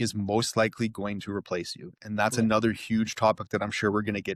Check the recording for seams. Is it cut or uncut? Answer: uncut